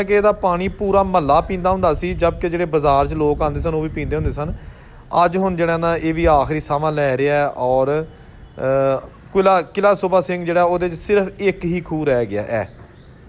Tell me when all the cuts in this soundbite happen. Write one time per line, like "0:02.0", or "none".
none